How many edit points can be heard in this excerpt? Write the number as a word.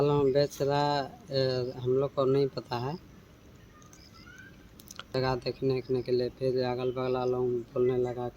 one